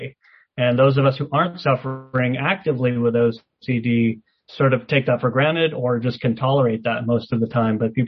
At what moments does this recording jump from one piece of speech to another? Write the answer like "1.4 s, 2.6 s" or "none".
none